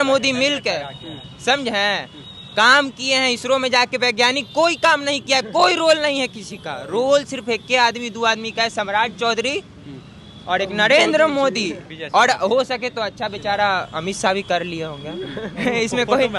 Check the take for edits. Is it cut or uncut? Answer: uncut